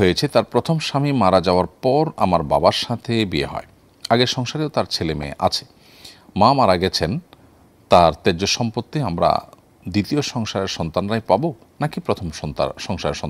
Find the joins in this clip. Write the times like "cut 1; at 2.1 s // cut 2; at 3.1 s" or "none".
none